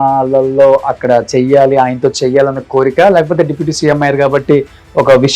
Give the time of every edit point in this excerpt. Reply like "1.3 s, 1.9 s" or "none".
none